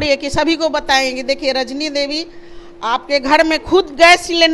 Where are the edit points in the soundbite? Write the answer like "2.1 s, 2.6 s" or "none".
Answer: none